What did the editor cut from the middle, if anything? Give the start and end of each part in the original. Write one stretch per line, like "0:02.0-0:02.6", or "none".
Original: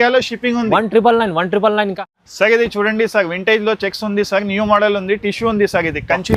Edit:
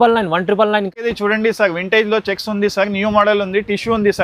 0:02.2-0:02.7